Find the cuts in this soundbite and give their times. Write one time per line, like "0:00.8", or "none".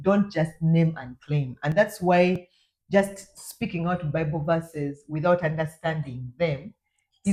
none